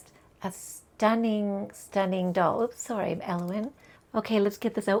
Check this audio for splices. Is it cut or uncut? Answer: uncut